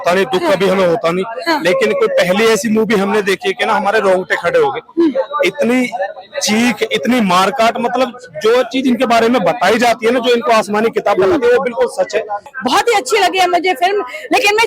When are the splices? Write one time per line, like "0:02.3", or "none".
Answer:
0:12.5